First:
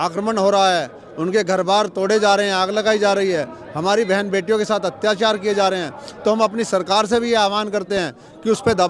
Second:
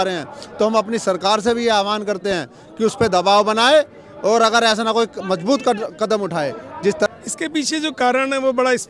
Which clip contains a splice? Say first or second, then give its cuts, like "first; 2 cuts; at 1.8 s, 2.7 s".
second; 1 cut; at 7.1 s